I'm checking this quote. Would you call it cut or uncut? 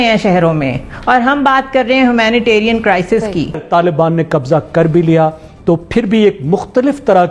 cut